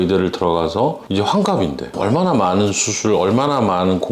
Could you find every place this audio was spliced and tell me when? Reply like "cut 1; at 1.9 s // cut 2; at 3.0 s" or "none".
cut 1; at 2.0 s